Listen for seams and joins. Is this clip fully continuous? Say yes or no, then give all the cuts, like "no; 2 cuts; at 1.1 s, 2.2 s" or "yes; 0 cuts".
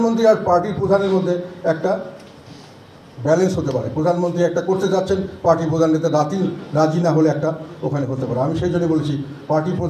yes; 0 cuts